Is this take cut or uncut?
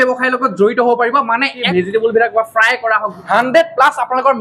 cut